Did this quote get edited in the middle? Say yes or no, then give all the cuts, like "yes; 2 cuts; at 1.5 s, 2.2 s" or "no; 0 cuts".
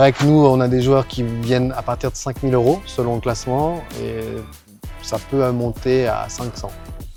no; 0 cuts